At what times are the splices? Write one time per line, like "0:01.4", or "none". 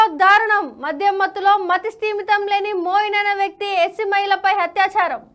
none